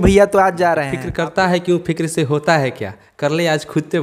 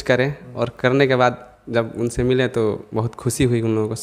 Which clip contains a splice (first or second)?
first